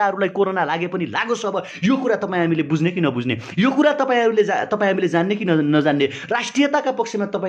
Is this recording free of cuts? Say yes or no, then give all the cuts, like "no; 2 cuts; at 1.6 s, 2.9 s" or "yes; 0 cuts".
yes; 0 cuts